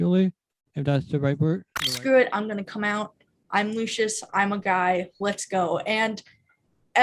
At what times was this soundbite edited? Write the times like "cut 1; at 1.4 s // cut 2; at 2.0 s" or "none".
cut 1; at 1.8 s